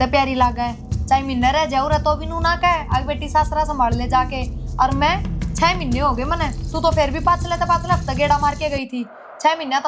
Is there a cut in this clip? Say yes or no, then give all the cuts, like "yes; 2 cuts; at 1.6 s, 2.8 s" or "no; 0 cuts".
no; 0 cuts